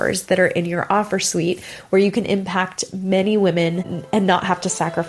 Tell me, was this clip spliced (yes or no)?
yes